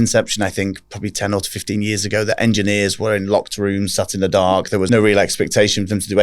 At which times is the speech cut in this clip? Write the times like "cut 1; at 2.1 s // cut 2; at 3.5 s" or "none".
cut 1; at 4.9 s